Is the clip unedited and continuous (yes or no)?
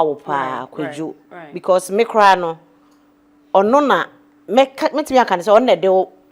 yes